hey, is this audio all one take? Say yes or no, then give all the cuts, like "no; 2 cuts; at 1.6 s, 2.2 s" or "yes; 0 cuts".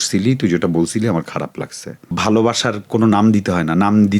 no; 1 cut; at 2.1 s